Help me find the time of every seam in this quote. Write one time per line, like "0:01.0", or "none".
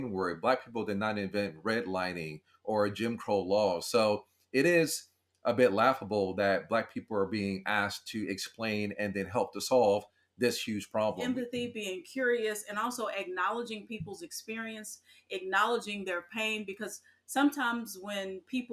0:11.2